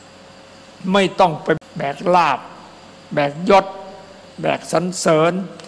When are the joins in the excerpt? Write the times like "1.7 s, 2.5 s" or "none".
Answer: 1.6 s